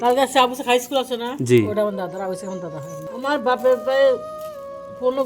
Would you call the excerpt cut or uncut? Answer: cut